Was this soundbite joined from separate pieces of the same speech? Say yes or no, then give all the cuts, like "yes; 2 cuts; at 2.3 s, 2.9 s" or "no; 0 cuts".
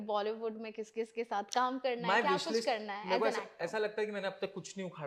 no; 0 cuts